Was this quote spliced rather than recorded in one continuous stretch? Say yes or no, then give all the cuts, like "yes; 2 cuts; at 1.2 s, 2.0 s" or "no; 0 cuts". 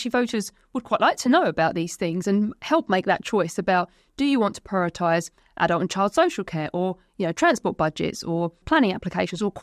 yes; 1 cut; at 8.6 s